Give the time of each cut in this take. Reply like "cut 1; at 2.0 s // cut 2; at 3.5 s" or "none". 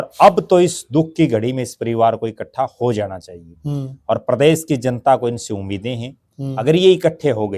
none